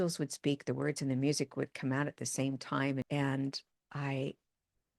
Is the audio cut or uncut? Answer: cut